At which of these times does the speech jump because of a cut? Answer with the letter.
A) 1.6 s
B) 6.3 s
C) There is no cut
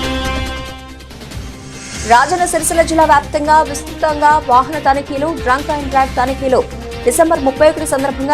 A